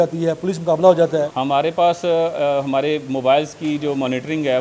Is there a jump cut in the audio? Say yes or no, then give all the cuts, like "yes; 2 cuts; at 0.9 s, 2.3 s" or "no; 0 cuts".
yes; 1 cut; at 1.3 s